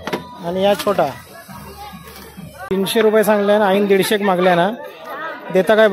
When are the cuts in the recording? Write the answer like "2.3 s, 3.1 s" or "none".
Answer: 2.7 s

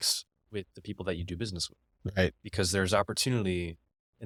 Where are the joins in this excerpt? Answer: none

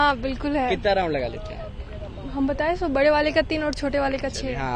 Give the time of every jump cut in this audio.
none

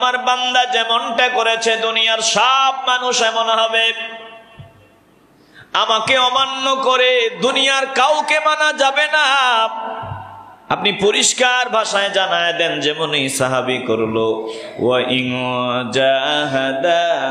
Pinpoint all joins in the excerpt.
none

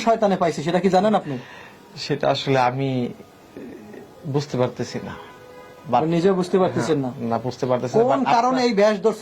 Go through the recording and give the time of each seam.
none

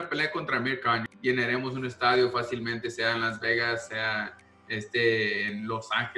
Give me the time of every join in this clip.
1.1 s

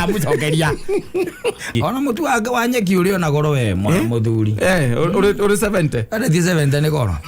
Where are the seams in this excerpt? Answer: 1.7 s

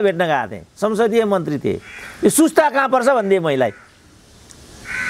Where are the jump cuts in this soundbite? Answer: none

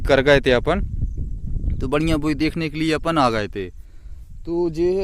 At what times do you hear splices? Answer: none

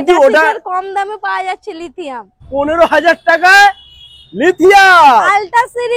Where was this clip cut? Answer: 2.3 s

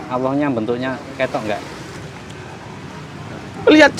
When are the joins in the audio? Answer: none

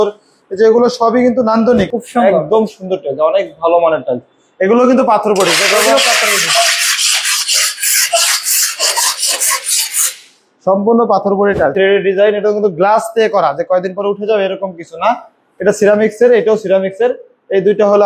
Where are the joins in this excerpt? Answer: 1.9 s, 11.7 s

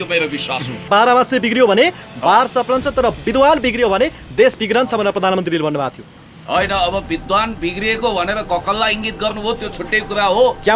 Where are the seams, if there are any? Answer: 0.9 s, 3.2 s

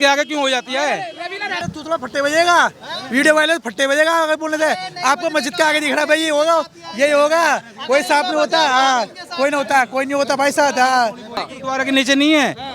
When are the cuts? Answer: 1.7 s, 11.4 s

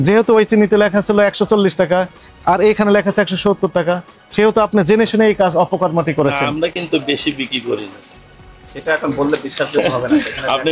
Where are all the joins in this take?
none

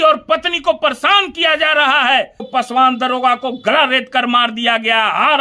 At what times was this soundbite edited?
2.4 s

